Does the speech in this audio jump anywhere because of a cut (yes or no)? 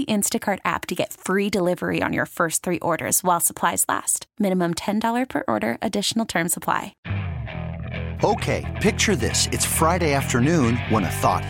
yes